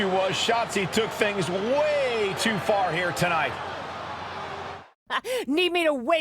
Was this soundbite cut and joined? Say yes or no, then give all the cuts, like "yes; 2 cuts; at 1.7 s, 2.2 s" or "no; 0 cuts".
yes; 1 cut; at 5.1 s